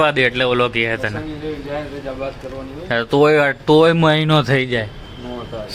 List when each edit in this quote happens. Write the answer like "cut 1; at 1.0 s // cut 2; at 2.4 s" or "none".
none